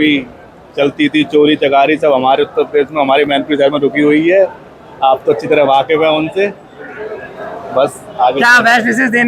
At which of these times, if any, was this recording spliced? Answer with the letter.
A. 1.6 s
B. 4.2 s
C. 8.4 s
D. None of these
D